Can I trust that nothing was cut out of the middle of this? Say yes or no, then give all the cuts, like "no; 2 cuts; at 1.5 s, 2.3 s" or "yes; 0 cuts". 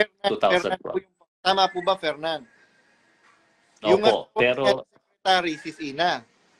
yes; 0 cuts